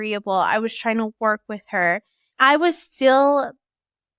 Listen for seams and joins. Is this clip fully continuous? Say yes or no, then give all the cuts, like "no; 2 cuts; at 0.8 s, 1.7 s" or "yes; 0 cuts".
no; 1 cut; at 2.1 s